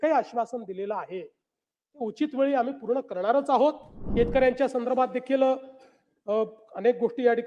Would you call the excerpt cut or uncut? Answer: cut